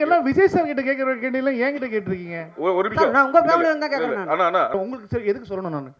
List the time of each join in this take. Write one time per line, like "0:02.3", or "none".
0:04.7